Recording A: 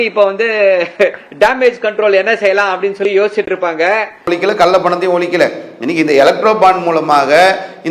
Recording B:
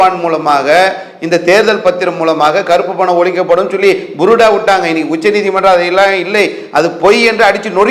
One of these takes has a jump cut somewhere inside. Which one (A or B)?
A